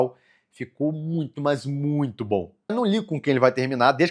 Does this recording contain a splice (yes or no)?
yes